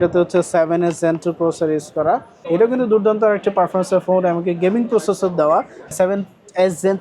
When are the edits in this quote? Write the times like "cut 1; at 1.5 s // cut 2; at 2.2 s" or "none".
cut 1; at 2.3 s // cut 2; at 5.9 s

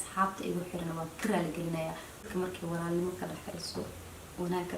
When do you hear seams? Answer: cut 1; at 2.1 s

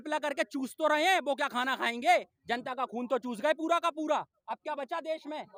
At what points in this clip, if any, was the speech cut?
none

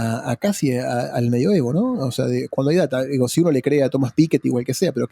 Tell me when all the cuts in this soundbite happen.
none

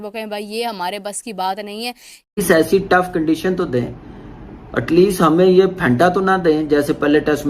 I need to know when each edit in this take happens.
cut 1; at 2.4 s

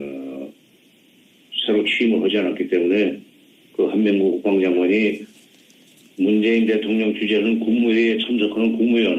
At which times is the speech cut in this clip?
none

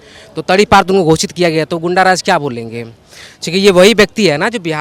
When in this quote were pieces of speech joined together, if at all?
none

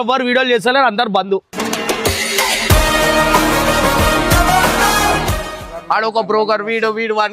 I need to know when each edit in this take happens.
cut 1; at 5.6 s

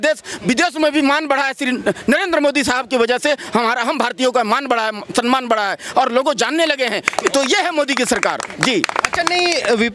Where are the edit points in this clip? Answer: none

